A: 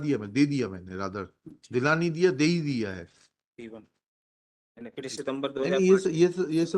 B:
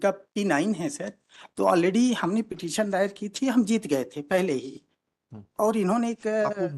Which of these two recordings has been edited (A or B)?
A